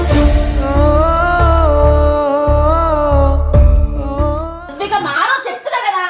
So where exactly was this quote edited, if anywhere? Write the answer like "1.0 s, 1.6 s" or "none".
4.7 s

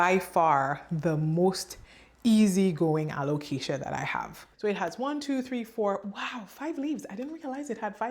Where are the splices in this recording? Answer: 4.4 s

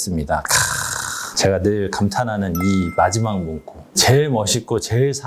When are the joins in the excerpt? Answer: 3.8 s

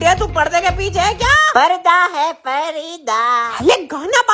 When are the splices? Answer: none

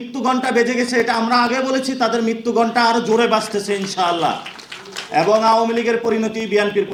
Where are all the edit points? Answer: none

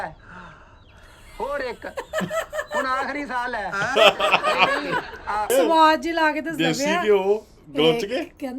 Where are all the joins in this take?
5.5 s

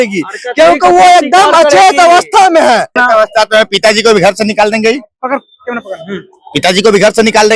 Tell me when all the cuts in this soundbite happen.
3.0 s

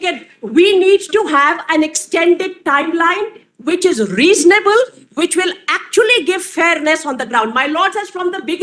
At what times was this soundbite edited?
none

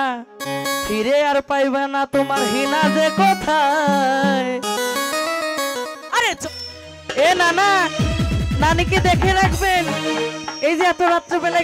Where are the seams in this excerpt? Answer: 6.4 s

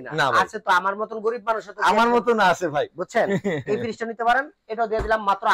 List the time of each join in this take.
none

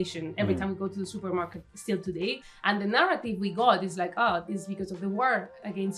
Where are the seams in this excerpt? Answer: 2.5 s

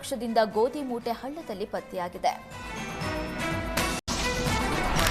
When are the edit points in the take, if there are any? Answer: 4.0 s

